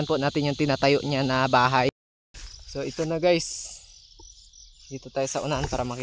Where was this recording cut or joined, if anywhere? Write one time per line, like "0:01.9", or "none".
0:01.9